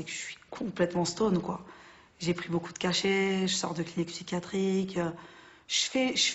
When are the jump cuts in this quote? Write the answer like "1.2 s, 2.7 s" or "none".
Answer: none